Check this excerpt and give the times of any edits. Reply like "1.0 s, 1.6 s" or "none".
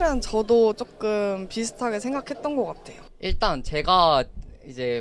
3.1 s